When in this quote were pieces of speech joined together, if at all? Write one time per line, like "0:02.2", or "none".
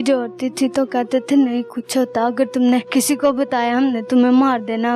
0:02.9

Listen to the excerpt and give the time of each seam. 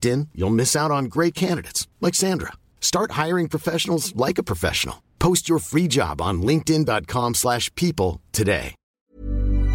0:08.8

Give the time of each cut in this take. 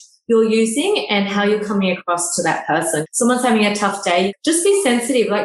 0:03.0
0:04.3

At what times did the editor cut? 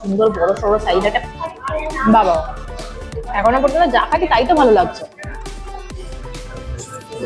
0:01.2

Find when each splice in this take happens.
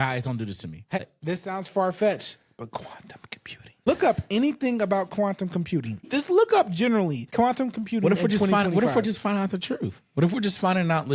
0:01.0
0:03.9
0:06.1
0:07.2

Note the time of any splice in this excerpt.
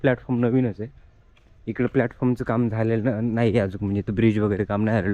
none

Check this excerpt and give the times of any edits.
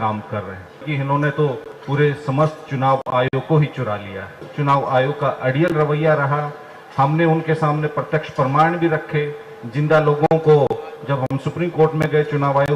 0:00.9
0:04.4

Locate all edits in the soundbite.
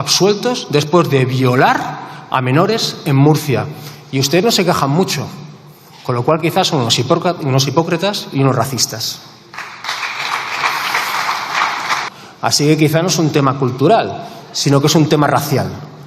0:12.1

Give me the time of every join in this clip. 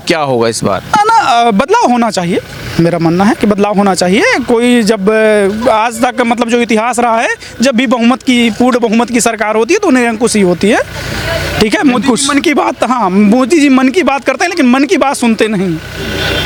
none

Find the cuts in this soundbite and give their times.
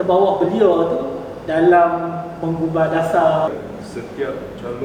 0:03.5

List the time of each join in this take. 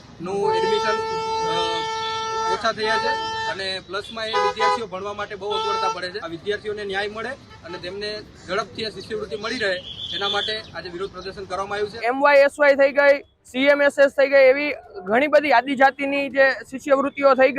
0:06.2
0:12.0

